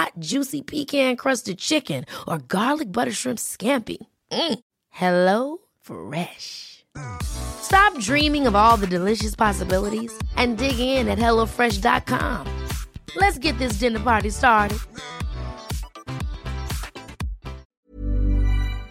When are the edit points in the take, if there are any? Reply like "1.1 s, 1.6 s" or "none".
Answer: 17.8 s